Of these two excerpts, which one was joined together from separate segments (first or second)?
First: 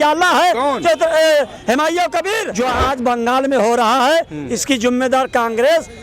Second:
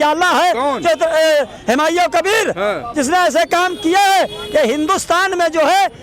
first